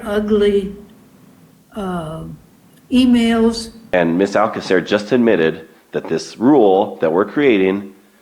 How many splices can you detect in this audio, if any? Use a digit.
1